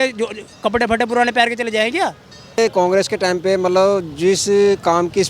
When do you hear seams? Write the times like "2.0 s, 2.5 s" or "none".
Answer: 2.6 s